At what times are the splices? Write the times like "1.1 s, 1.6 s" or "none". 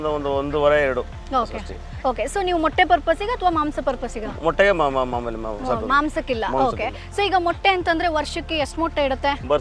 none